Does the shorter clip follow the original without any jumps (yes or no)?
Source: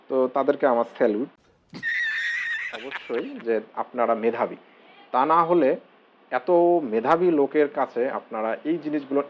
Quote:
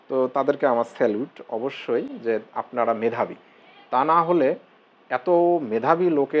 no